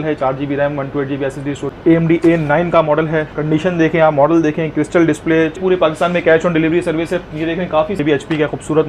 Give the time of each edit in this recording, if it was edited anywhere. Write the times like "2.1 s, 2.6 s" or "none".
1.6 s, 5.6 s, 8.0 s